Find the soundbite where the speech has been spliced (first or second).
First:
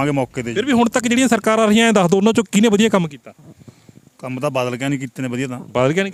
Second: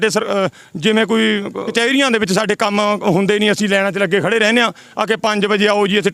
second